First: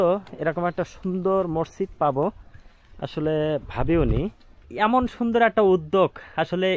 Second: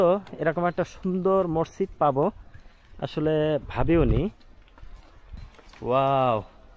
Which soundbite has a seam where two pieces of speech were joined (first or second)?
first